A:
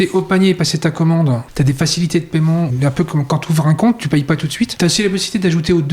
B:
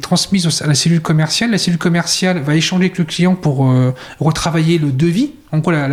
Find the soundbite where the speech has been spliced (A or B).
A